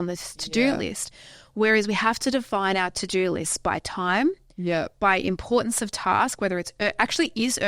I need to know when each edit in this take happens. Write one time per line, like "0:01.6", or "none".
none